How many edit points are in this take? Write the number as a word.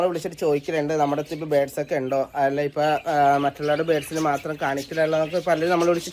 zero